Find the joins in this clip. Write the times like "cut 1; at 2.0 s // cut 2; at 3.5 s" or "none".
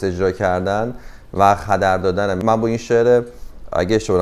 none